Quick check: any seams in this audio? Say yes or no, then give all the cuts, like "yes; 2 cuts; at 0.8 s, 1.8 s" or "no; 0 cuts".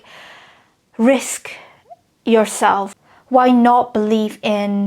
yes; 1 cut; at 2.9 s